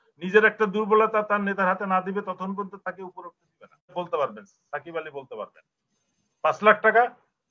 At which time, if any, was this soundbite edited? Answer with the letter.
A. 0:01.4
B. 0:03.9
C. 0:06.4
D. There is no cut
B